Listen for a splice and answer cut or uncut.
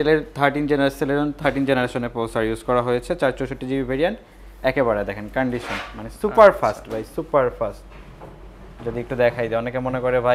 uncut